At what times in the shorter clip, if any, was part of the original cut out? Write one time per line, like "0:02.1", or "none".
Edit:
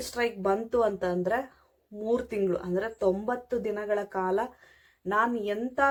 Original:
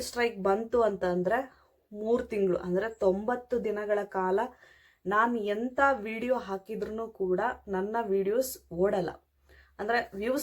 none